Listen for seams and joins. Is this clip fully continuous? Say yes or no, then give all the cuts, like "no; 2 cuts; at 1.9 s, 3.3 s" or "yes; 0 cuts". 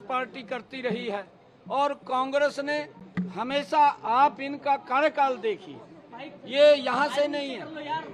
yes; 0 cuts